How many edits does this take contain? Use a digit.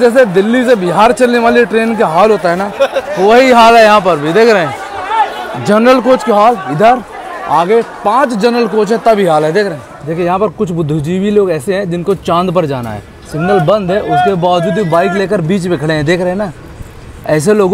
1